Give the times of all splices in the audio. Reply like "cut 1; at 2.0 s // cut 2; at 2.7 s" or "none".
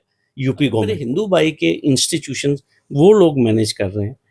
cut 1; at 1.0 s